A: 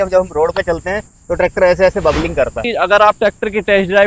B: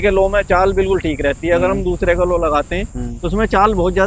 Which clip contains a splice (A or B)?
A